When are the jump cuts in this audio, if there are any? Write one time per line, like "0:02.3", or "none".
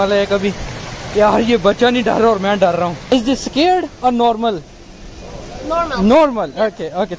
0:03.0

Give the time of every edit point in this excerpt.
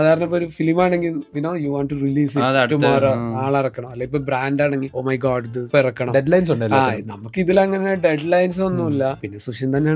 none

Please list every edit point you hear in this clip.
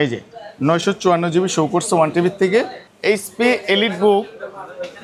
0:02.8

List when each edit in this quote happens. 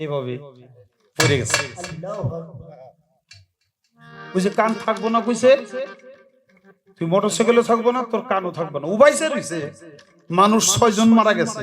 none

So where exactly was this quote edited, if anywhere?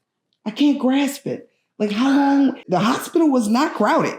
0:02.6

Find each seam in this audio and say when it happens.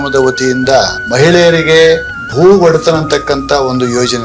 0:01.0
0:02.2

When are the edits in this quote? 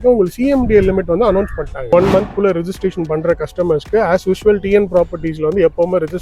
0:01.9

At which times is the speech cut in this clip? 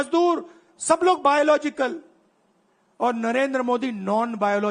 none

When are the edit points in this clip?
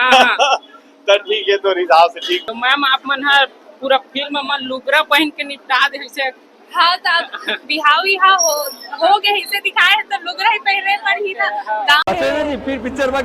0:02.4
0:12.1

